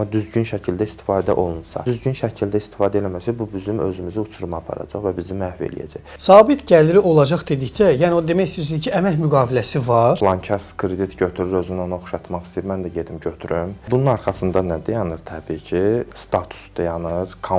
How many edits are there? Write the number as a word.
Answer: four